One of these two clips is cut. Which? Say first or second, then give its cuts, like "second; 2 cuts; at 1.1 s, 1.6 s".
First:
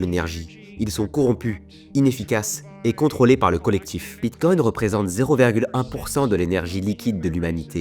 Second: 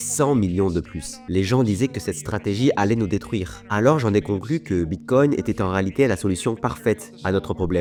first; 1 cut; at 4.0 s